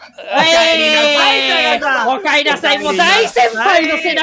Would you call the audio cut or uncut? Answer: uncut